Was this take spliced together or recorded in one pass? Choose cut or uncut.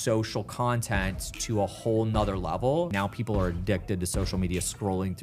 cut